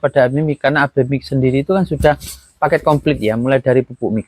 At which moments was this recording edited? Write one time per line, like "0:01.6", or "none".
none